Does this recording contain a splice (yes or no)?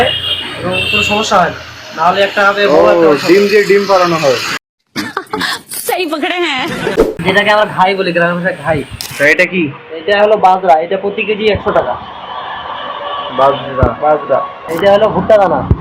no